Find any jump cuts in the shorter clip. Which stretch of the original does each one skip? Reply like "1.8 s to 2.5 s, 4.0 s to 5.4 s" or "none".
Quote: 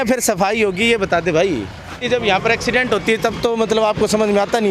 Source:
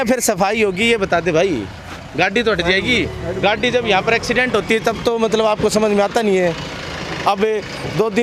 2.0 s to 3.6 s